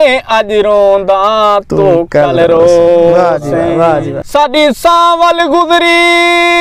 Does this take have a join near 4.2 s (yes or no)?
yes